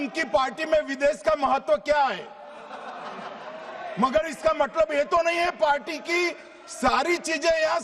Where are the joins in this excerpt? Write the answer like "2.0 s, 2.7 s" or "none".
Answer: none